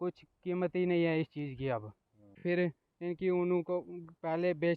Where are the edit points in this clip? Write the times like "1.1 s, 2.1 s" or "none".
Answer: 2.4 s